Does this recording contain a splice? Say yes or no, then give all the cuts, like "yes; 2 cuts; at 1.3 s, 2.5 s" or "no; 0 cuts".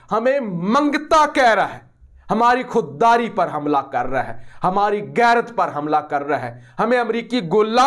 no; 0 cuts